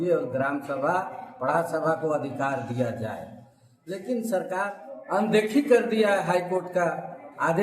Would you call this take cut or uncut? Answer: cut